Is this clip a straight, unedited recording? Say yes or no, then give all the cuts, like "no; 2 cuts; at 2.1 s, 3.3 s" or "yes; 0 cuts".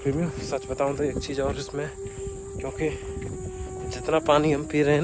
yes; 0 cuts